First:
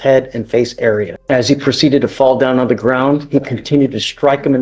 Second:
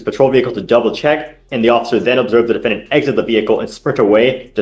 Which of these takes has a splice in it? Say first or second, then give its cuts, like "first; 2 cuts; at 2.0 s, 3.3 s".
first; 1 cut; at 1.1 s